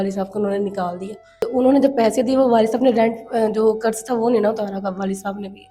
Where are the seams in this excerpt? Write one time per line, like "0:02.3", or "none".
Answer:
0:01.4